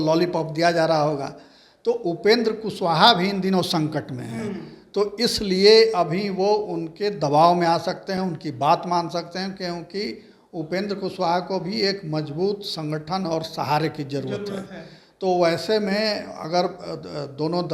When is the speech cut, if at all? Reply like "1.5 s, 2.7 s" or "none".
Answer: none